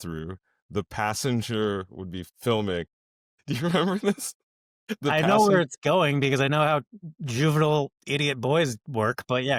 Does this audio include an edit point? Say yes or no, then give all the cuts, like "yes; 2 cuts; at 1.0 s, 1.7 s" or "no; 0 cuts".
no; 0 cuts